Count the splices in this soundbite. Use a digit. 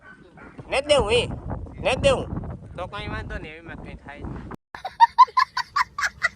1